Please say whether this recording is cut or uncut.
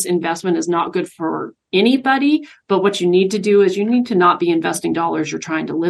uncut